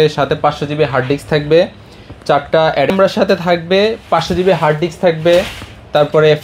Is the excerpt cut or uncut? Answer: uncut